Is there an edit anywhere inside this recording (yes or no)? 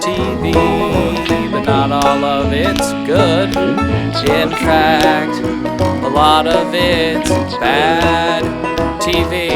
no